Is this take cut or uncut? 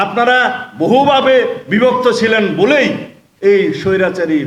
uncut